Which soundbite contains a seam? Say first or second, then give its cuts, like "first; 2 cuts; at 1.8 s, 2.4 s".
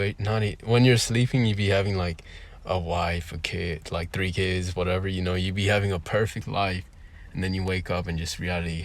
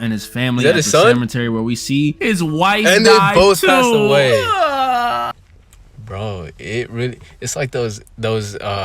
second; 1 cut; at 5.4 s